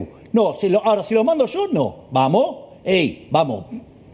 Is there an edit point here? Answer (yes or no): no